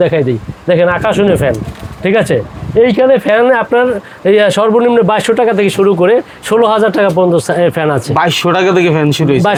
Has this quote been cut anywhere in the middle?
no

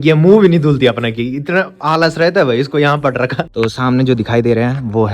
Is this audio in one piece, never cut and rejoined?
no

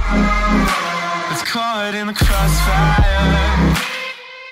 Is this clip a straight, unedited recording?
no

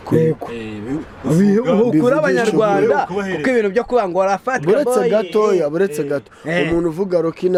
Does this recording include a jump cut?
no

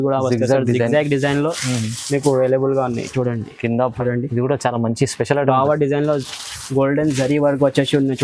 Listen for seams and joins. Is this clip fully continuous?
no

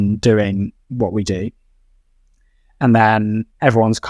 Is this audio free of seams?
yes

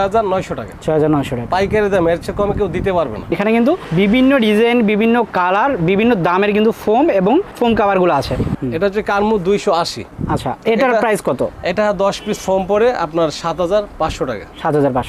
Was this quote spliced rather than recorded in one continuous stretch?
yes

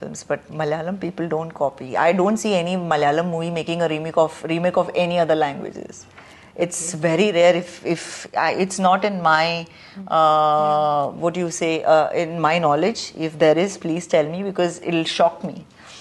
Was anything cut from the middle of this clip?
no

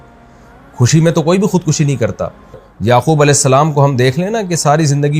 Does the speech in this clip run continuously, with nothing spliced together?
no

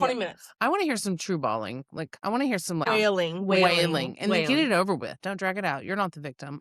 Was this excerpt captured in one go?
no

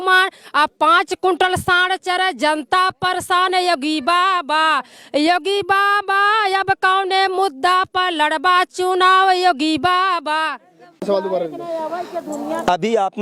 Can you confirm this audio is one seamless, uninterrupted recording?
yes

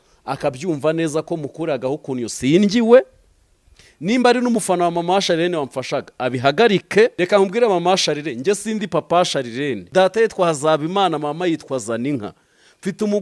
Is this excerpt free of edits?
no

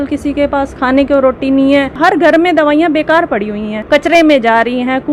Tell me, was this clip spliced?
yes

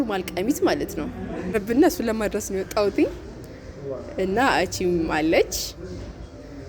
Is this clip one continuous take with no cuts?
no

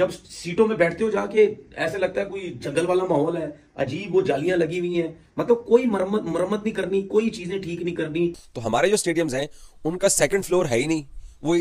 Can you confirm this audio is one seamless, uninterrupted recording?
no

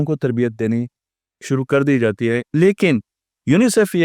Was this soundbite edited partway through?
yes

